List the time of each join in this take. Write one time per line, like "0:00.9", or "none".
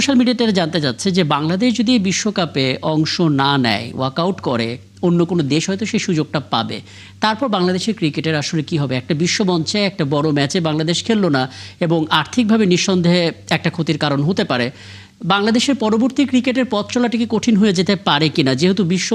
none